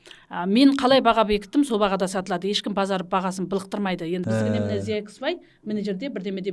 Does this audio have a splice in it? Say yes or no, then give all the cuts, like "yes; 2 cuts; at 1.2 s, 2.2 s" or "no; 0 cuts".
yes; 1 cut; at 4.2 s